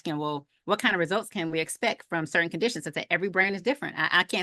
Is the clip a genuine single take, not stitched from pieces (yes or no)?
yes